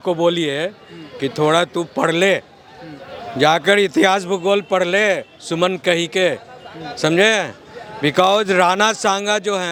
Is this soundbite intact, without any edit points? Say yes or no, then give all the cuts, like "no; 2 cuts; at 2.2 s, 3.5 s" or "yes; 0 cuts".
yes; 0 cuts